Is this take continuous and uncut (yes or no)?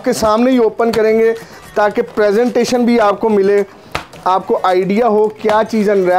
yes